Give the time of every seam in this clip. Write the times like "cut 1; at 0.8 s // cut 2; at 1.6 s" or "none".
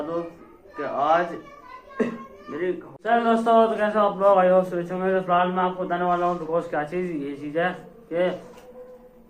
cut 1; at 2.9 s